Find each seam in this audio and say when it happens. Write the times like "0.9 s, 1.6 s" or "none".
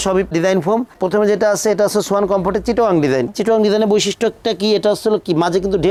none